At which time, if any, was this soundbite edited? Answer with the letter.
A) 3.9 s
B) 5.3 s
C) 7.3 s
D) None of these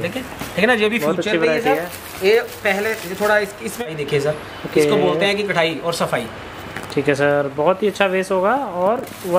A